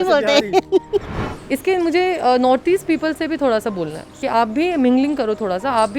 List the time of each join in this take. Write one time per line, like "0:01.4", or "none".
0:01.2
0:04.2